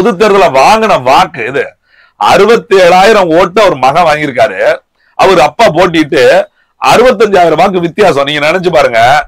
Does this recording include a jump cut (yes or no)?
no